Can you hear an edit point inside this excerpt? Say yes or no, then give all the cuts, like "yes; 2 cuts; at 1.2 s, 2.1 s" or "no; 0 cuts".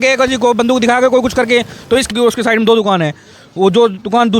yes; 1 cut; at 2.1 s